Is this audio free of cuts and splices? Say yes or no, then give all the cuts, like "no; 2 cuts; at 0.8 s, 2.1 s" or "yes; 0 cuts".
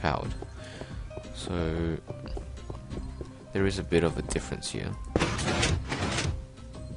no; 1 cut; at 1.7 s